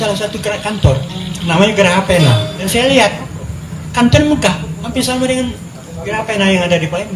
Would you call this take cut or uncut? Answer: cut